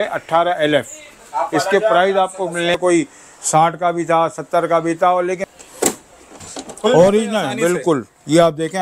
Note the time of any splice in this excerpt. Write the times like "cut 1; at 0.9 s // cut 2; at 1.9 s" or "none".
cut 1; at 2.8 s // cut 2; at 5.4 s